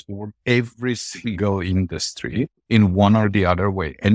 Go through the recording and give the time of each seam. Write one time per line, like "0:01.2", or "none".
0:02.6